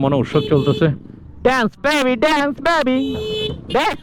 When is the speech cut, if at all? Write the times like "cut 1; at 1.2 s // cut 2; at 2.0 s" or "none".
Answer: none